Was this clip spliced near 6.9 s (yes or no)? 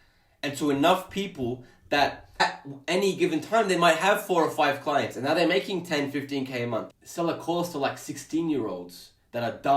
yes